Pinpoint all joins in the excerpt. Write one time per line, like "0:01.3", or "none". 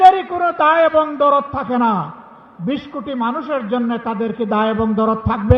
none